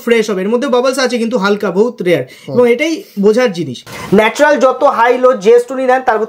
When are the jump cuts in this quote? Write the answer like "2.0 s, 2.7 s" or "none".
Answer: 3.9 s